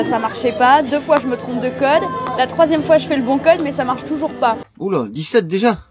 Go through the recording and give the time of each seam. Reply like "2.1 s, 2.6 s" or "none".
4.7 s